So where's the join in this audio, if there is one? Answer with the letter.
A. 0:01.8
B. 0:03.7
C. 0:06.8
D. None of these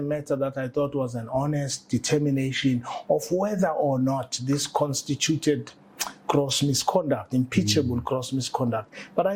D